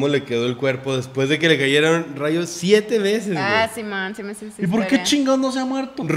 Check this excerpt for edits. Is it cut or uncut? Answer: uncut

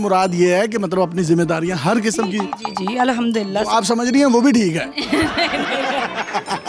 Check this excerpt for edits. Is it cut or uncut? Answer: uncut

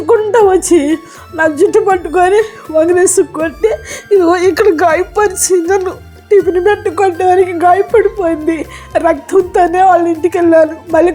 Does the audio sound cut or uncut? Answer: uncut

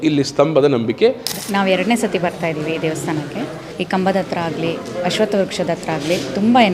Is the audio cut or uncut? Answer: cut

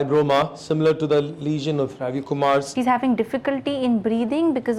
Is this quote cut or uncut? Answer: cut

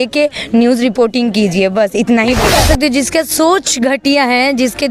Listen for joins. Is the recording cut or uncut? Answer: cut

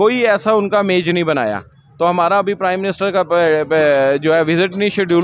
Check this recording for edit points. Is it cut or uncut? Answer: uncut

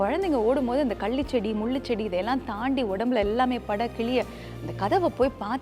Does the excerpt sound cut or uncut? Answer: uncut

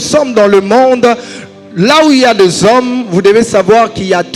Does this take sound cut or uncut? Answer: uncut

